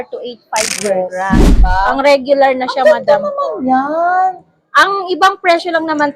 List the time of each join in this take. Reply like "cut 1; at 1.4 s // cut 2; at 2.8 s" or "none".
cut 1; at 1.5 s